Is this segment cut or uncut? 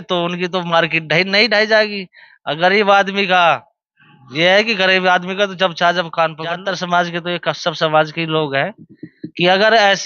cut